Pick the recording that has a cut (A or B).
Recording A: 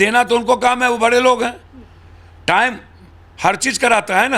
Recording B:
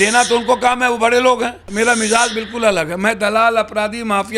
B